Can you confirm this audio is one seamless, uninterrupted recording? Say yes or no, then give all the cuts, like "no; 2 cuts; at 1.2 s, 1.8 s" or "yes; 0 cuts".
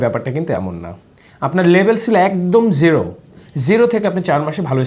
yes; 0 cuts